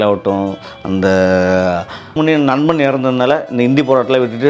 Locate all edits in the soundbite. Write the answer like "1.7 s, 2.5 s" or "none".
2.1 s